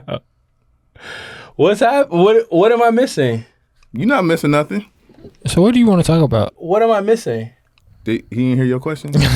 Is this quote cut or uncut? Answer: cut